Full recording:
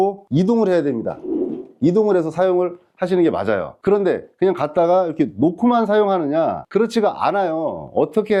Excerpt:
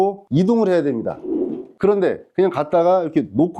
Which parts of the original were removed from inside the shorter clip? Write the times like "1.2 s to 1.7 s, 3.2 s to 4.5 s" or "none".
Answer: 1.7 s to 3.7 s